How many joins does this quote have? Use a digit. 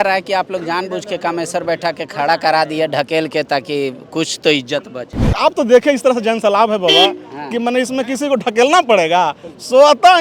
1